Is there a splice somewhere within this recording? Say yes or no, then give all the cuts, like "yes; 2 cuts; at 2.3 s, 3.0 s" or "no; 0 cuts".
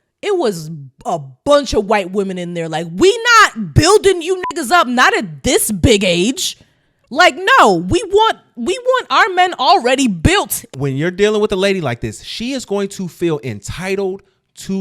yes; 1 cut; at 10.6 s